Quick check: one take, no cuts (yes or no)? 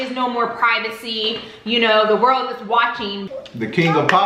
no